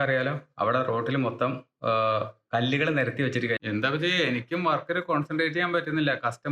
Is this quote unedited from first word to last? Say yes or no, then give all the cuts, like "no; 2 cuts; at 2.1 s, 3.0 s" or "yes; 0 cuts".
no; 1 cut; at 3.6 s